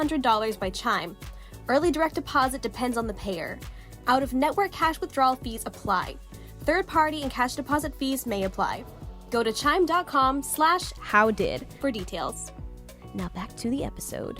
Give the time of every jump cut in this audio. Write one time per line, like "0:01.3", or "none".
0:10.9
0:11.7